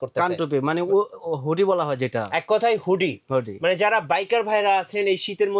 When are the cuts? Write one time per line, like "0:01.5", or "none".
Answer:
none